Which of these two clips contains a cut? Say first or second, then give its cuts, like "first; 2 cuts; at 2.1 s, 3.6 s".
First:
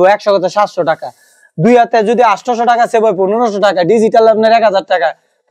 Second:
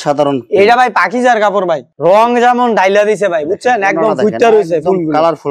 second; 1 cut; at 1.9 s